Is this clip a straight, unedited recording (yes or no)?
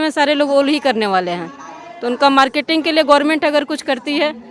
yes